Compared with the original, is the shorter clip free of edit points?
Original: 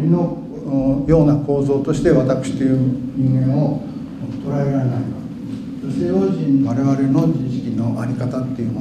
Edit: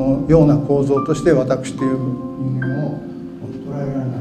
yes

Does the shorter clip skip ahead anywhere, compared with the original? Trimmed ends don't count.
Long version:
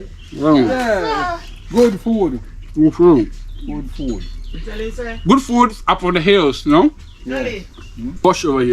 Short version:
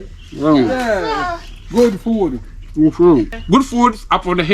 yes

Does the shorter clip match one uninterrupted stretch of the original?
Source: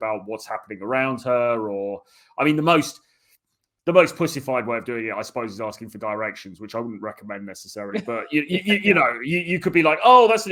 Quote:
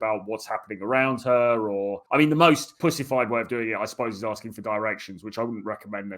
no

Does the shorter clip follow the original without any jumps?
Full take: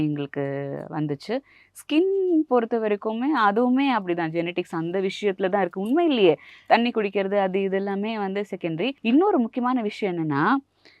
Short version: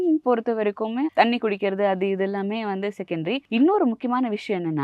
no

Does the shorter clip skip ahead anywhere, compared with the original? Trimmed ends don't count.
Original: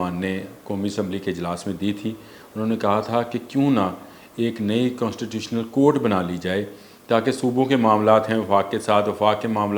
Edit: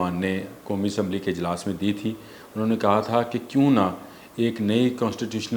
no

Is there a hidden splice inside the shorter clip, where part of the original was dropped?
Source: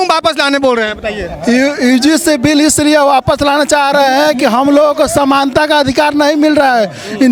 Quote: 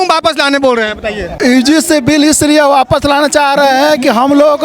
yes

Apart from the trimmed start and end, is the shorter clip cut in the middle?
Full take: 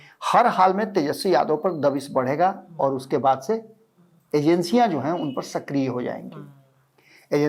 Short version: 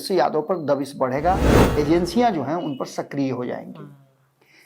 yes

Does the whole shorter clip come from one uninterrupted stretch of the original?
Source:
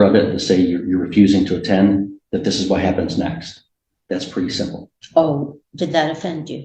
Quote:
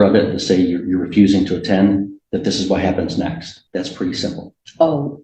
no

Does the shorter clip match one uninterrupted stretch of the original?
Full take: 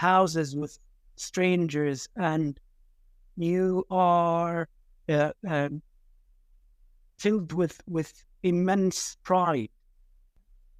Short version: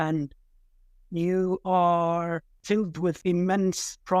no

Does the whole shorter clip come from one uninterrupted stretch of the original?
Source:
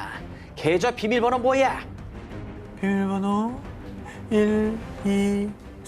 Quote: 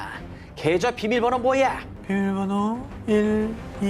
no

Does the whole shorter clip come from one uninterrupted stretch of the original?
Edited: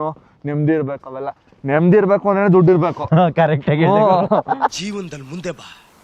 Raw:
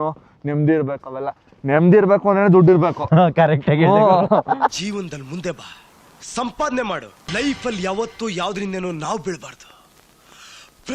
yes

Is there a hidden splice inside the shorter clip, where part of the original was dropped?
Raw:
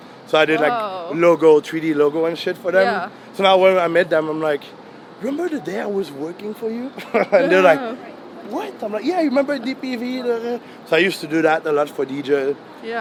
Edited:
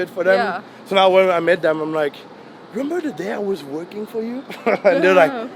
no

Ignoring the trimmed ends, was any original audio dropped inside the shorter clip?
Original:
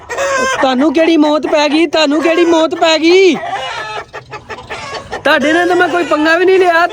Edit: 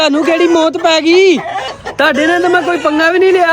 yes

